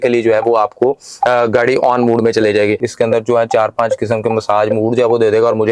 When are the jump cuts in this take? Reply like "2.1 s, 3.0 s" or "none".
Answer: 2.9 s